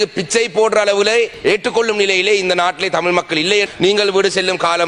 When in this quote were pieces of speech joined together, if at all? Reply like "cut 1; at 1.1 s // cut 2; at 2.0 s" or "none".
cut 1; at 1.3 s // cut 2; at 3.7 s

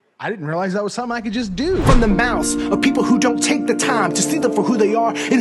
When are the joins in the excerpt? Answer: cut 1; at 1.8 s

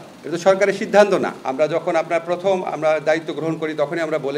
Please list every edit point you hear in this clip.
cut 1; at 1.4 s

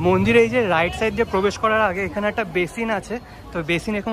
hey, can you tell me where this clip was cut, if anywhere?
none

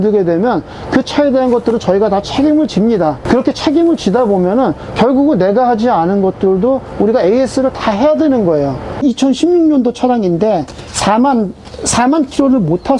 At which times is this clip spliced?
cut 1; at 9.0 s

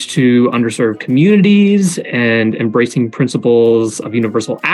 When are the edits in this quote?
none

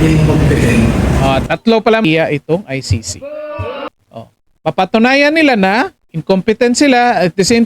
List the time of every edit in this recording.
cut 1; at 2.0 s

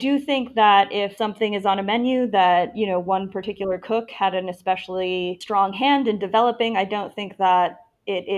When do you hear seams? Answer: cut 1; at 1.1 s // cut 2; at 5.4 s

